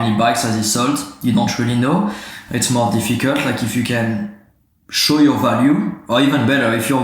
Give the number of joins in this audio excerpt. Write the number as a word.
one